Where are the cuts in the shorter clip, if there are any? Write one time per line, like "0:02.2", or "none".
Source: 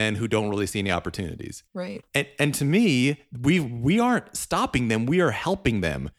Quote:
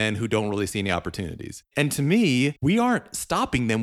0:01.7
0:02.6